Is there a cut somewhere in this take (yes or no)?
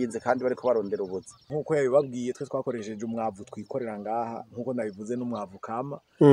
yes